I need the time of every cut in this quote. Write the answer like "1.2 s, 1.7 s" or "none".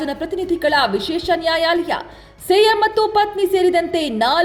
none